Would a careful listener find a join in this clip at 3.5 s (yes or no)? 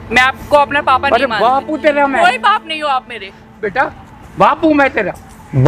yes